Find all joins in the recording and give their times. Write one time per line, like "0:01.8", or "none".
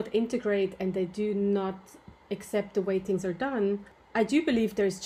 none